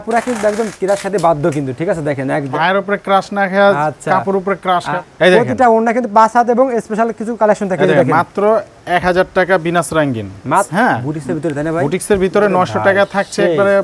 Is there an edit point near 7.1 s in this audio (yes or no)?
no